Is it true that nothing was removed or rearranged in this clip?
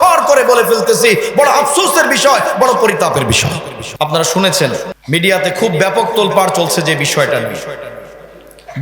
no; 2 cuts; at 3.8 s, 4.9 s

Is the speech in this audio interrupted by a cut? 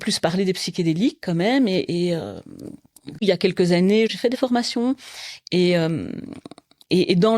yes; 2 cuts; at 3.2 s, 4.1 s

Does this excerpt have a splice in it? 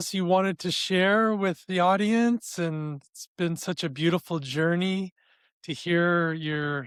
no; 0 cuts

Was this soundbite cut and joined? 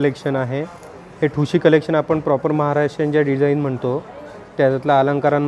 no; 0 cuts

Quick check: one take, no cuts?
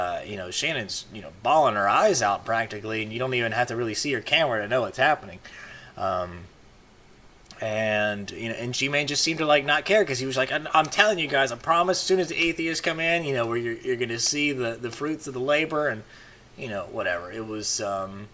yes; 0 cuts

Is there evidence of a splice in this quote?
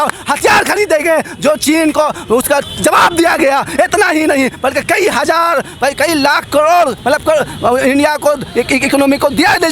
no; 0 cuts

